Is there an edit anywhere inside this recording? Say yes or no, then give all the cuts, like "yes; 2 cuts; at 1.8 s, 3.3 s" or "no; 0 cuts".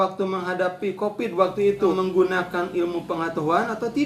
yes; 1 cut; at 1.9 s